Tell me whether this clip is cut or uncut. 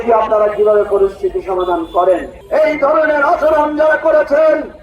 cut